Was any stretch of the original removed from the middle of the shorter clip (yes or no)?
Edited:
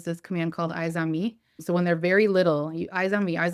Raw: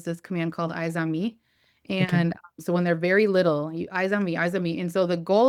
yes